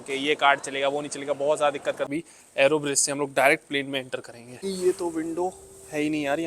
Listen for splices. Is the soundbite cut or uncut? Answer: cut